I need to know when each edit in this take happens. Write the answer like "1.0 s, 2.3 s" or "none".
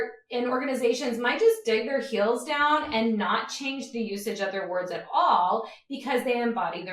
none